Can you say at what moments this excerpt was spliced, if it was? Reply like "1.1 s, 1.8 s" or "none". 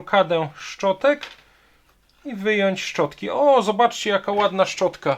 none